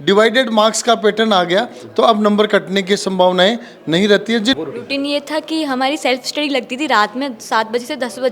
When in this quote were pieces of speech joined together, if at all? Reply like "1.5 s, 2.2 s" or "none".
4.5 s